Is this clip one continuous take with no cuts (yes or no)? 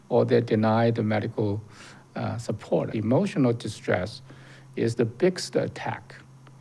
no